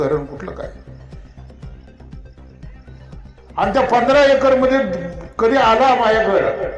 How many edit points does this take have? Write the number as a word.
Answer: two